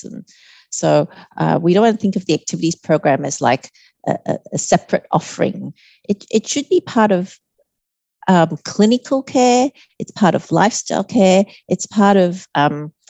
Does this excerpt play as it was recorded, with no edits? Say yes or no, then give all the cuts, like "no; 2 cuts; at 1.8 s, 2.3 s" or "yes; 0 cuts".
yes; 0 cuts